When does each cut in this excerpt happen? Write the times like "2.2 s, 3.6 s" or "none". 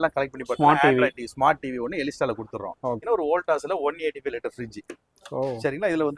3.0 s